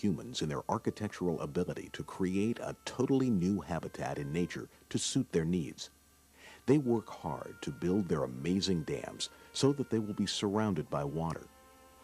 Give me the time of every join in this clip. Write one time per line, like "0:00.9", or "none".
0:09.9

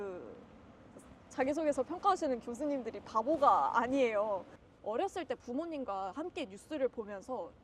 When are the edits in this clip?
0:04.5

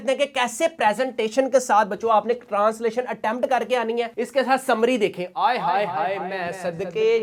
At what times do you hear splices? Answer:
none

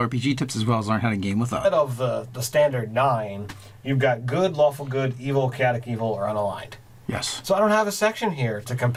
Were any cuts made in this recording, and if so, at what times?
none

